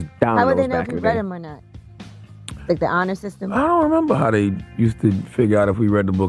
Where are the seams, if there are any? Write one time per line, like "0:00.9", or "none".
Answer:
0:05.2